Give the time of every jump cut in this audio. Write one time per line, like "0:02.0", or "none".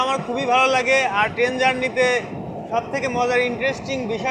none